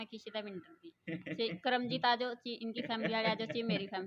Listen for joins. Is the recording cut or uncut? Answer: uncut